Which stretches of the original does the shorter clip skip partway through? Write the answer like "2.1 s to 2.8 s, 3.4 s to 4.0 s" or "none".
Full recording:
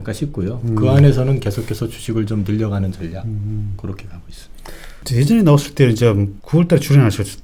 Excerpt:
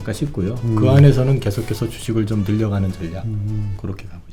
none